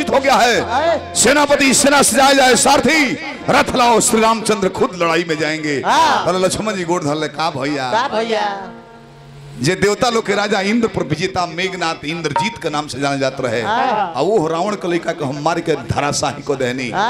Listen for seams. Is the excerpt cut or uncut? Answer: uncut